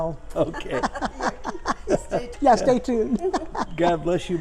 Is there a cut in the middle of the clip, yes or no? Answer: yes